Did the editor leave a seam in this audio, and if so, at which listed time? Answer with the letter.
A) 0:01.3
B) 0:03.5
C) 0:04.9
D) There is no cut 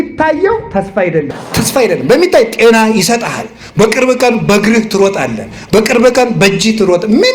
A